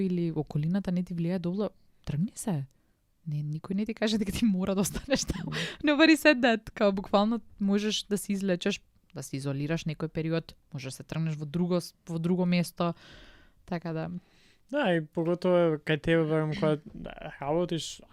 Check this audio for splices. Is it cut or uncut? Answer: uncut